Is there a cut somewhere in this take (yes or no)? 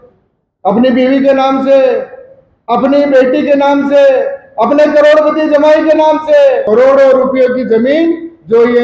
yes